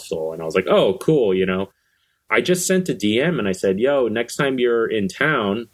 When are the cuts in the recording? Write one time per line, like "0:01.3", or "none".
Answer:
0:02.0